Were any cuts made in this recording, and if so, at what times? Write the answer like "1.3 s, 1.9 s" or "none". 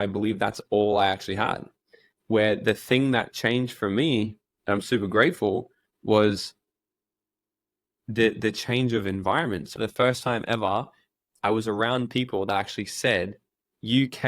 9.7 s